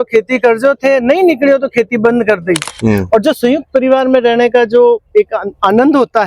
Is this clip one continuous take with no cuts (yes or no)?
no